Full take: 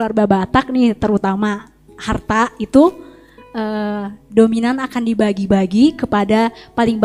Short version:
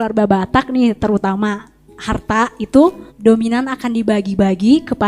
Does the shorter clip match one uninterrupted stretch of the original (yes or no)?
no